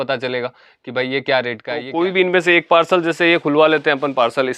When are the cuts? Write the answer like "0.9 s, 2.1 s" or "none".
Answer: 1.9 s

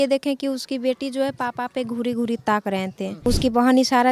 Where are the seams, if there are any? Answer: 3.1 s

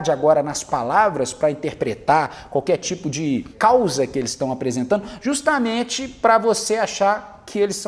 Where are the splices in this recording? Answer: 3.5 s

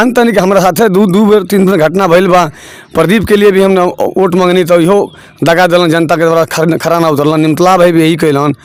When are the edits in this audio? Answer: none

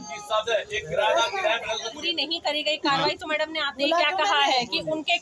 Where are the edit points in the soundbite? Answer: 2.0 s

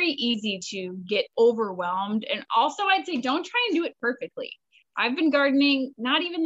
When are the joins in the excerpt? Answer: 1.3 s

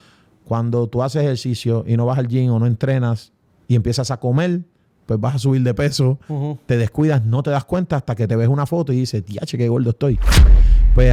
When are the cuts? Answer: none

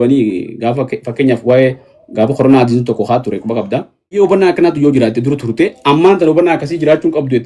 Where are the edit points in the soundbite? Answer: 4.2 s

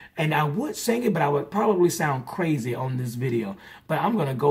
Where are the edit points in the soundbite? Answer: none

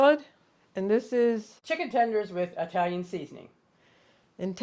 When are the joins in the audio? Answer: 1.5 s

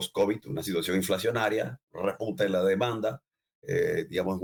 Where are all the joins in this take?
none

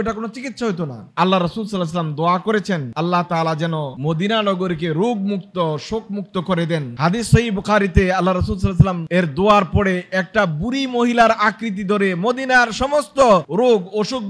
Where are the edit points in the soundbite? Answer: 1.1 s

